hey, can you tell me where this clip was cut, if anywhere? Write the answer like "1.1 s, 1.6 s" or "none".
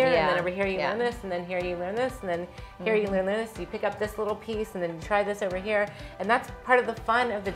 none